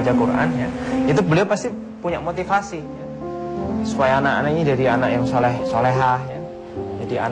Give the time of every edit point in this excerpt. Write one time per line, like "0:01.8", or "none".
0:02.2